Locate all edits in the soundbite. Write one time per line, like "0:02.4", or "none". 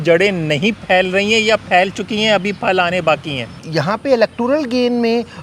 0:03.6